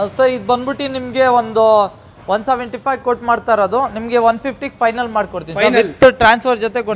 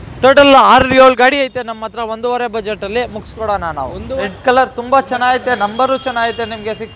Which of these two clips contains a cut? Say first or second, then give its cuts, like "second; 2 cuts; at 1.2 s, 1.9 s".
second; 1 cut; at 4.3 s